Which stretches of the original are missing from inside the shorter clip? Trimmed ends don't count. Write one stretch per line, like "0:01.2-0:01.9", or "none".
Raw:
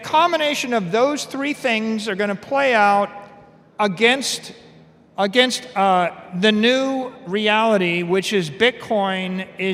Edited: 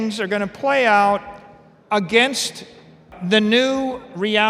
0:05.0-0:06.2